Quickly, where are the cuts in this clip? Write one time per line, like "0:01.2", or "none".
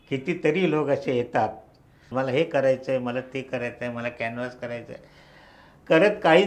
0:02.1

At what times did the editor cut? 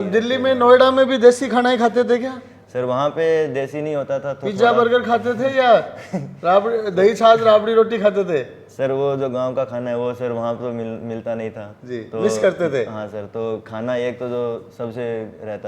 none

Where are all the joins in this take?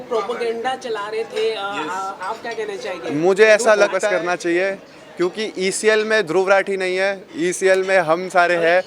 0:03.9

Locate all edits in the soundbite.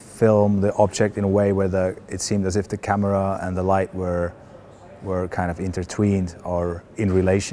none

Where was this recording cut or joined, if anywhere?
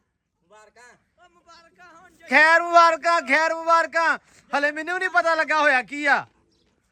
none

